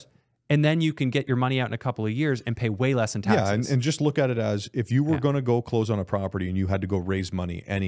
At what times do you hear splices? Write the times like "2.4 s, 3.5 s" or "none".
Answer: none